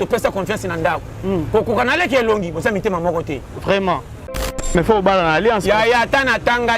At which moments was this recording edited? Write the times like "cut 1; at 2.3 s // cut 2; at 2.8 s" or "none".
cut 1; at 4.6 s